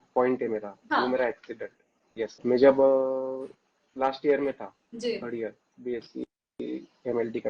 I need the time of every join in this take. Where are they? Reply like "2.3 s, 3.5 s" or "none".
2.4 s